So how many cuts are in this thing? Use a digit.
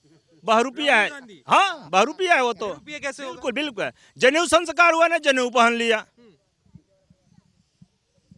0